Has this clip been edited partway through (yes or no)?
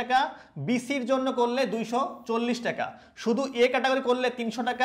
no